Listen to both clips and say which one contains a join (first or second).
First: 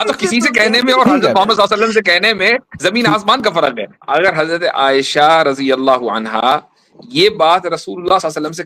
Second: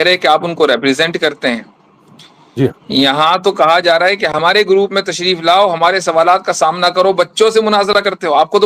first